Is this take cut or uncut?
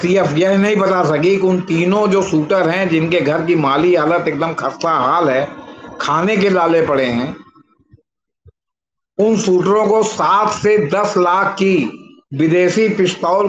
uncut